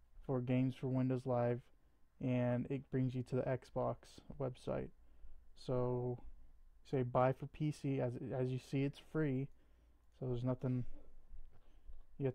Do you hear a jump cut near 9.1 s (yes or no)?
no